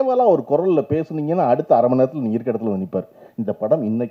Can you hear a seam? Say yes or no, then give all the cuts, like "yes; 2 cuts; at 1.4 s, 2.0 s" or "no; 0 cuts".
yes; 1 cut; at 3.2 s